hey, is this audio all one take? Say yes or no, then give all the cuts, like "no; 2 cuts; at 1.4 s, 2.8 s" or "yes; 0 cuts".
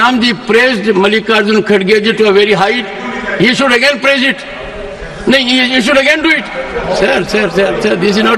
yes; 0 cuts